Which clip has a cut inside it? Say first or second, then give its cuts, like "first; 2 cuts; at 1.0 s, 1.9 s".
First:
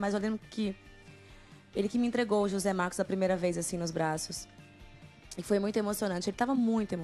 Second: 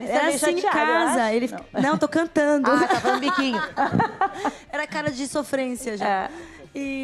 second; 1 cut; at 2.9 s